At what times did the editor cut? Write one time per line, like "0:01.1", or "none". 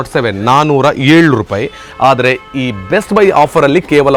none